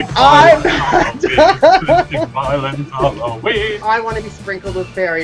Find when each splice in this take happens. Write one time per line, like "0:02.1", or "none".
0:03.8